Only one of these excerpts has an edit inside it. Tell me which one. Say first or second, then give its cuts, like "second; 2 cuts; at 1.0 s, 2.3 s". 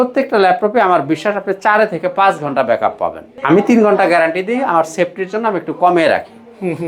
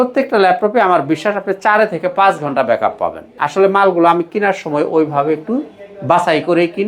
second; 1 cut; at 3.3 s